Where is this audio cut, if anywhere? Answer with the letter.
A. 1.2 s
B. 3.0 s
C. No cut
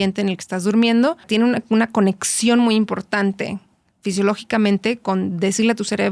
A